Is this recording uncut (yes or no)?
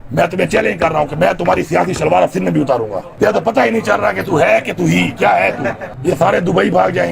no